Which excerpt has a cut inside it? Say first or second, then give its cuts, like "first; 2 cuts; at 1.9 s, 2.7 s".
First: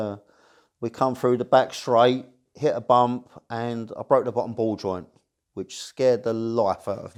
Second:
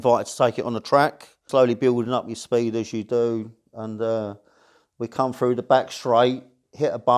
second; 1 cut; at 1.4 s